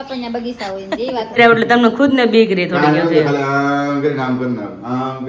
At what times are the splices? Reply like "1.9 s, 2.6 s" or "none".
1.4 s

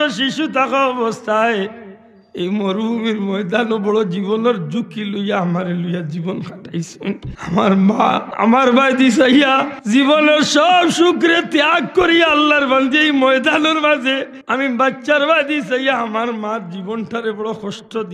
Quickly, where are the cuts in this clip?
7.3 s, 8.3 s, 9.7 s, 14.4 s

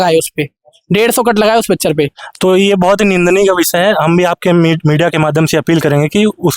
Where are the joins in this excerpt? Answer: none

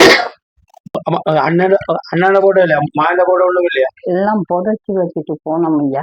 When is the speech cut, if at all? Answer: 1.0 s

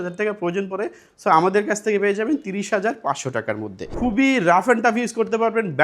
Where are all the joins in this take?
3.9 s

